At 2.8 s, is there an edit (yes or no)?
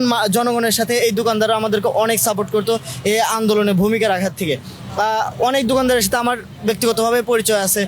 no